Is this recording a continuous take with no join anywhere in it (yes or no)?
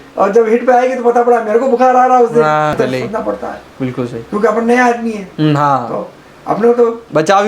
no